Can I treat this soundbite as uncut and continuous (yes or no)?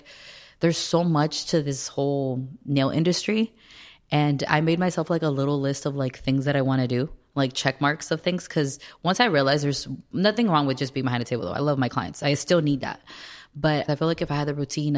no